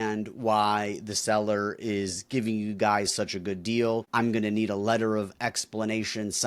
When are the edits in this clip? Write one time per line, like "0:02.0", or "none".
0:04.1